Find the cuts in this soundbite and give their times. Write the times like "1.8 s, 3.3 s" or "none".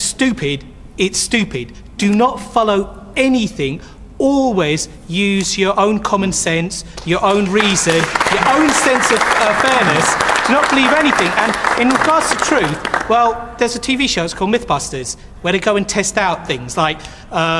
2.9 s